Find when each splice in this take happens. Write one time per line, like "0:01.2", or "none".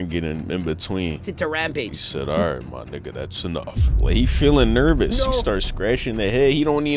none